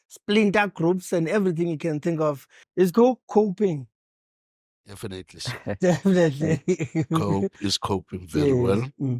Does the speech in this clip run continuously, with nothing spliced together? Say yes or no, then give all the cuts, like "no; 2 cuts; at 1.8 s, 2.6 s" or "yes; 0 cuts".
no; 1 cut; at 2.5 s